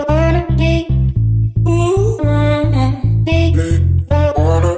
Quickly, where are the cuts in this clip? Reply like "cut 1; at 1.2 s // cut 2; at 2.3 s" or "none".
none